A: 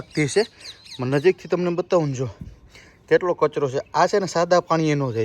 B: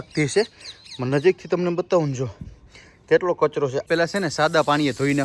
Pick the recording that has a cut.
B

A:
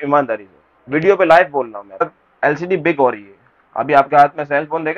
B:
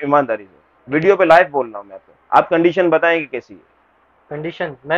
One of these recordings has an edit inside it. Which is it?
A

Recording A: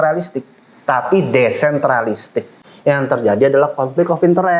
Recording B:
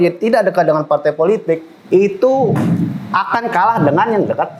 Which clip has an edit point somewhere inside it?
A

